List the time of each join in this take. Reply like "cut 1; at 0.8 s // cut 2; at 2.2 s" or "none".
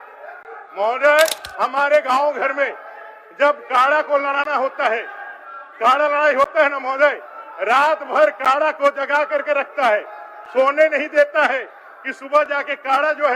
cut 1; at 1.4 s